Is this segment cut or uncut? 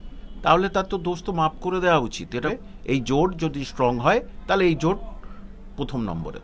cut